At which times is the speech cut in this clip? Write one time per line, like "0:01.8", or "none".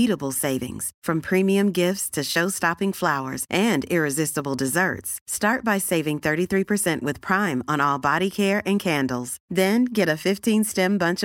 none